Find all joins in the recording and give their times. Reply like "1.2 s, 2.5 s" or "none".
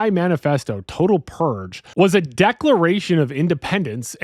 1.9 s